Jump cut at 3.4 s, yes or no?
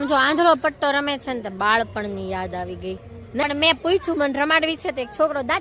yes